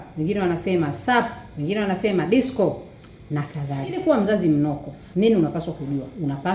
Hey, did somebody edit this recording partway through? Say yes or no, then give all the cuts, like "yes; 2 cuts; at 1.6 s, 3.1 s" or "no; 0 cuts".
yes; 1 cut; at 4.0 s